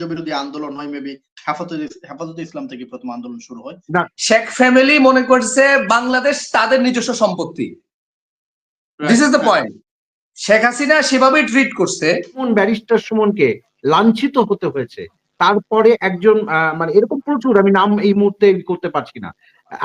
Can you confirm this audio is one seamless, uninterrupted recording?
no; 2 cuts; at 4.1 s, 12.5 s

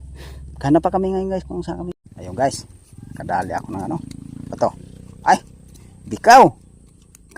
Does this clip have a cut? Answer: yes; 1 cut; at 1.9 s

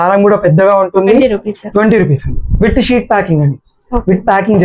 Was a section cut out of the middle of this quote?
yes; 1 cut; at 1.2 s

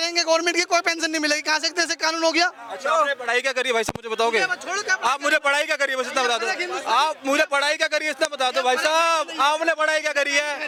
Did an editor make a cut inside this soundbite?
no; 0 cuts

